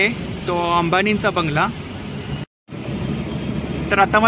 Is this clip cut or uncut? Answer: cut